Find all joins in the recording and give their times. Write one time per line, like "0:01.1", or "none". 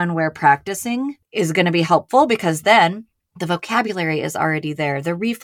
0:01.2